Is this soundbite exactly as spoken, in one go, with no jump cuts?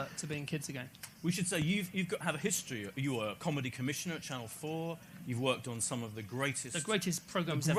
yes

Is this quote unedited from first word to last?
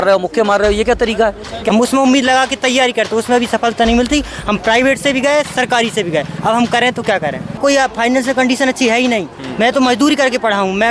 no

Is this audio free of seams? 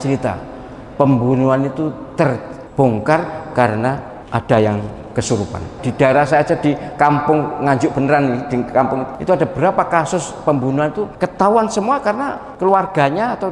no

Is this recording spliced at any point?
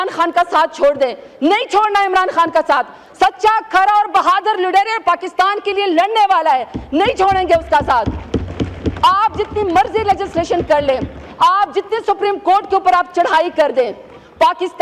no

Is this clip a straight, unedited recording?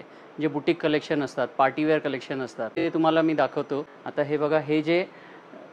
no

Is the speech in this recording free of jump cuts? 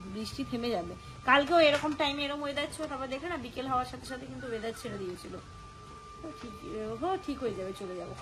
yes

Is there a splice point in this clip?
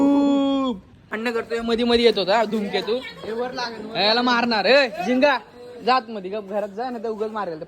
yes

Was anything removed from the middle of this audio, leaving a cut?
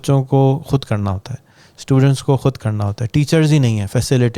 no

